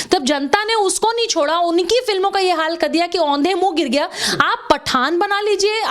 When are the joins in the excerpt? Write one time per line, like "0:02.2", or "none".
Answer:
none